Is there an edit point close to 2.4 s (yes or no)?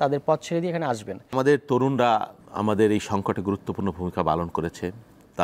yes